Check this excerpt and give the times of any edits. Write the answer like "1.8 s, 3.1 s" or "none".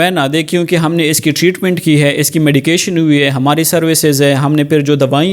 none